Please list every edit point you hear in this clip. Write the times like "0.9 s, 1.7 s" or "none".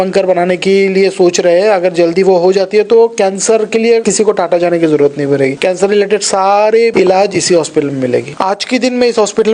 4.0 s, 5.6 s, 6.9 s, 8.3 s